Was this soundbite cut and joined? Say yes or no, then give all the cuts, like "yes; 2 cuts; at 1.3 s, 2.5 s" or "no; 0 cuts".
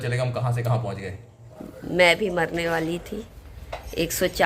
yes; 1 cut; at 1.4 s